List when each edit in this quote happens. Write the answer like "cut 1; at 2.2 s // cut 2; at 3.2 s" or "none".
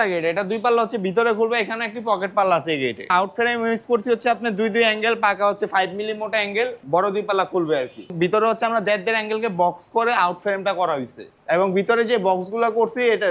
cut 1; at 3.1 s // cut 2; at 6.8 s // cut 3; at 8.1 s // cut 4; at 11.3 s